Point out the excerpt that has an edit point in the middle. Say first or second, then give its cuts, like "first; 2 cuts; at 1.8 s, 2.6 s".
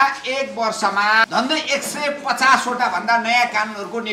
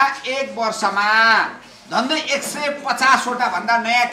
first; 1 cut; at 1.2 s